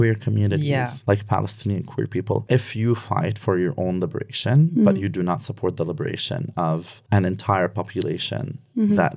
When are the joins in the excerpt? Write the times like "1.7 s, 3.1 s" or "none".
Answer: 0.9 s, 2.4 s